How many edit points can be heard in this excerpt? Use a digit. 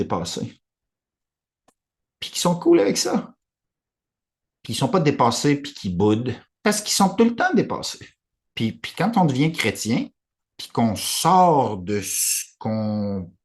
1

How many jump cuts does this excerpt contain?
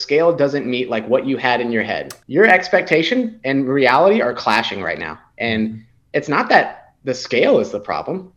1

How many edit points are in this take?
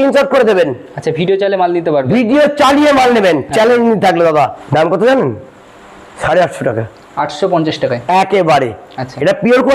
1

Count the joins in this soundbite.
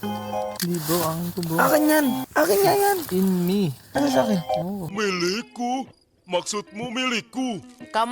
1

